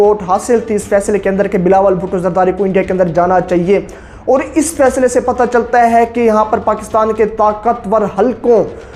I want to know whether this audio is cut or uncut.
uncut